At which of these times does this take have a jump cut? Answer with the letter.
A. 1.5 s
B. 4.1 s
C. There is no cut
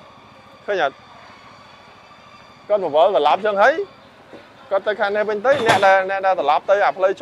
C